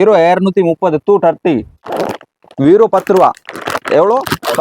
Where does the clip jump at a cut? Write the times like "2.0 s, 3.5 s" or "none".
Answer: 1.9 s